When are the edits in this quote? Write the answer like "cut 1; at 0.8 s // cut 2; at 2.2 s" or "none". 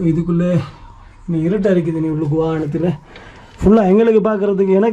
none